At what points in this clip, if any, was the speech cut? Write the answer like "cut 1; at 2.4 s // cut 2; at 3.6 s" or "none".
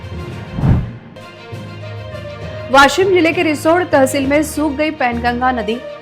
cut 1; at 1.0 s